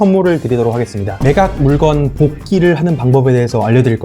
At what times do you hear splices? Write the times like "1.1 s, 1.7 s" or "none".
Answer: 1.1 s